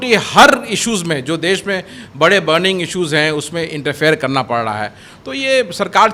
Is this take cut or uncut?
uncut